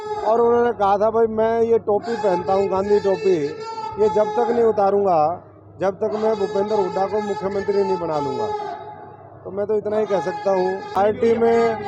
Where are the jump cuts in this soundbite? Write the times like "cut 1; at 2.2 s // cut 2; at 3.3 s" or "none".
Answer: cut 1; at 11.0 s